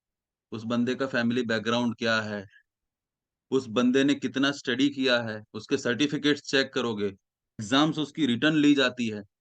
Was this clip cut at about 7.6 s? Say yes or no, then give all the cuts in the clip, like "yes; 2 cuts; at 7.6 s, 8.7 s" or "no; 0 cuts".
yes; 1 cut; at 7.6 s